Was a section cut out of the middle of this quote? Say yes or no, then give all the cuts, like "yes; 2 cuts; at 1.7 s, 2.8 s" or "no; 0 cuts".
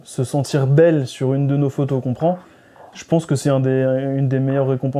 no; 0 cuts